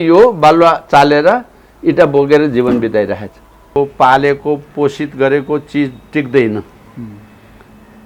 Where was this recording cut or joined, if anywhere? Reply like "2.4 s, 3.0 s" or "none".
3.7 s